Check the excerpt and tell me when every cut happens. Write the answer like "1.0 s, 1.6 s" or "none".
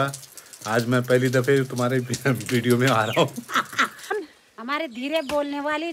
4.2 s